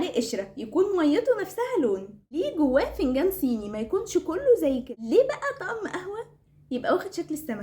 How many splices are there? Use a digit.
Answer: 2